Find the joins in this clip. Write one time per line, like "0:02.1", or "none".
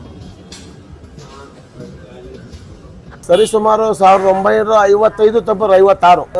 0:03.2